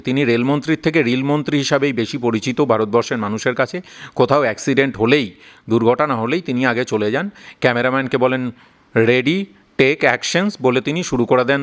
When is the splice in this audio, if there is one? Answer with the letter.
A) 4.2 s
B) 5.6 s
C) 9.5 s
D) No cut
D